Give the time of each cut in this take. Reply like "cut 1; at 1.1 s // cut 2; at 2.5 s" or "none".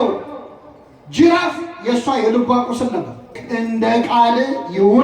cut 1; at 3.4 s